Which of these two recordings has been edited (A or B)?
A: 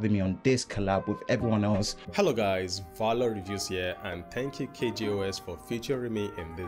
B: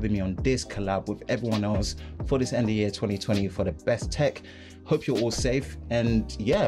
A